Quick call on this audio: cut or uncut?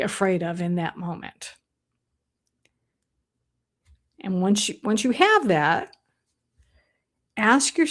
uncut